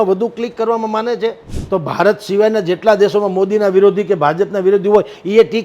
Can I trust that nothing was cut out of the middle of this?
no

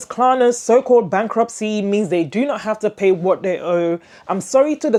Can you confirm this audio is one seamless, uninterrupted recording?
yes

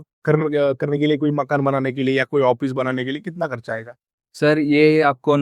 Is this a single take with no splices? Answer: yes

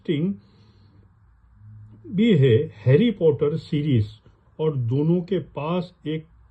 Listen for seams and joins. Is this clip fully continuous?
yes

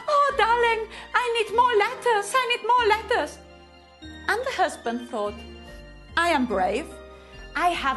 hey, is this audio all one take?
no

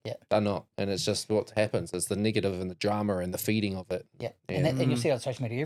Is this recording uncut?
yes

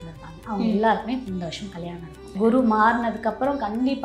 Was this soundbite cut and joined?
yes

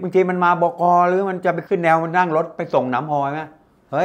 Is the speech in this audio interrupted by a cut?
yes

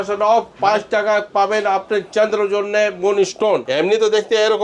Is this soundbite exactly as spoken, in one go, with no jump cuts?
no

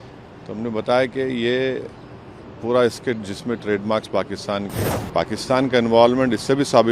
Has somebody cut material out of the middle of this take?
yes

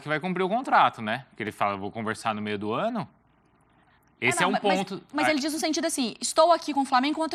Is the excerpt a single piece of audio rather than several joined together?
yes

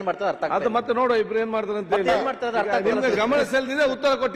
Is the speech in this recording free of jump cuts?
yes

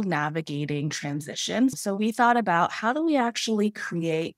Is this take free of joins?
no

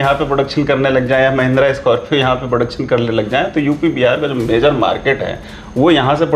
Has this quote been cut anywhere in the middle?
no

